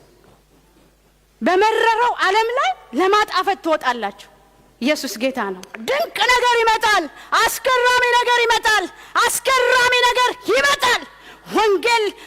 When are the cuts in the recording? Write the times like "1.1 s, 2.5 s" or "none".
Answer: 5.7 s